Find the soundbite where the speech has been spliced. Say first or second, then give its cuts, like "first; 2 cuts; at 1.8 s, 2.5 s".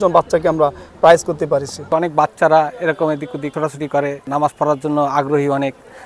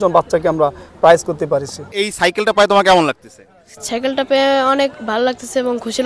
second; 1 cut; at 1.8 s